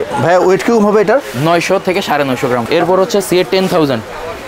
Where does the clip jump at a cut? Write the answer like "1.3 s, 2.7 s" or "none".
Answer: 2.6 s